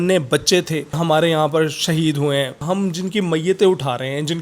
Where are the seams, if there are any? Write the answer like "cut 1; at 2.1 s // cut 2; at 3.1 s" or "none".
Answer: cut 1; at 1.0 s // cut 2; at 2.6 s